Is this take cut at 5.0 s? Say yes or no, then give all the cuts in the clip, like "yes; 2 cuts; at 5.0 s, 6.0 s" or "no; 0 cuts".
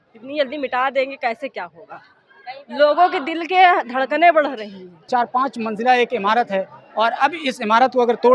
yes; 1 cut; at 5.0 s